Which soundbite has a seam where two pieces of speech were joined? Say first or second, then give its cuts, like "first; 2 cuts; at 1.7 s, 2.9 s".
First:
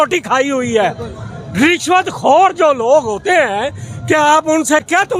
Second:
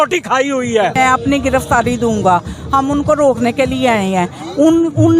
second; 1 cut; at 0.9 s